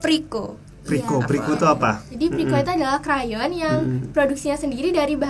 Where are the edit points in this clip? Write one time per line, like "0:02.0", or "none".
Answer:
none

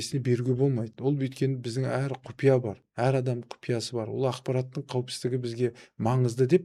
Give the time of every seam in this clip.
none

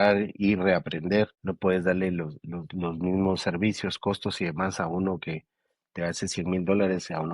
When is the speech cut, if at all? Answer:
0:01.4

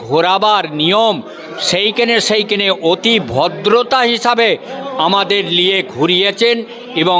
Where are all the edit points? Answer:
none

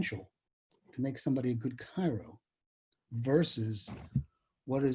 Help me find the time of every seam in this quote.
none

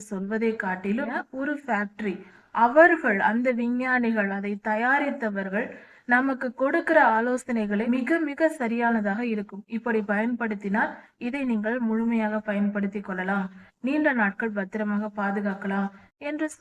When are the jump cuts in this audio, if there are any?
0:01.2
0:07.8

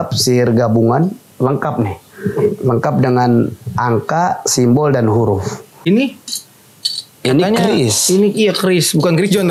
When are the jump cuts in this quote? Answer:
0:05.7

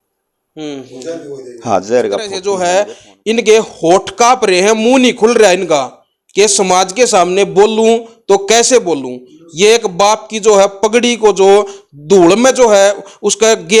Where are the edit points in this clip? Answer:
0:02.4

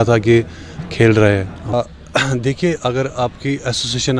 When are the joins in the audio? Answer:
0:01.7

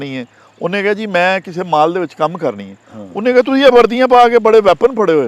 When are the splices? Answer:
none

